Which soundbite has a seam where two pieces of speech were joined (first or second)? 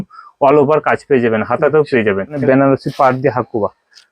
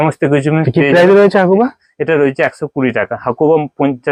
first